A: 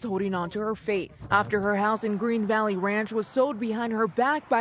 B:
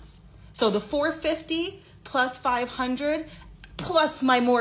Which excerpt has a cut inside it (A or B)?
A